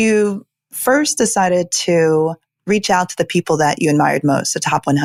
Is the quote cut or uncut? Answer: uncut